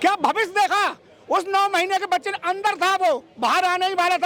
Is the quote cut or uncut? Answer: uncut